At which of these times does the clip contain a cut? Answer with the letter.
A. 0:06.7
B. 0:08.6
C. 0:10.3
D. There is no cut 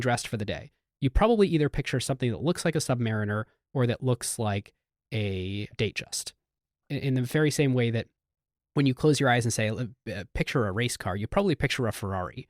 A